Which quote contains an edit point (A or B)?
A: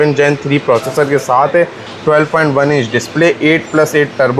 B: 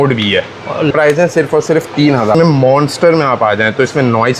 B